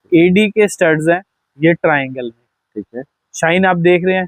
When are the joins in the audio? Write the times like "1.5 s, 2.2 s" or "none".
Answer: 1.3 s